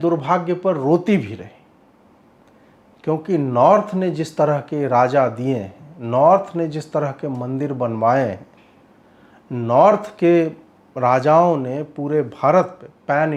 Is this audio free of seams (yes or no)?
yes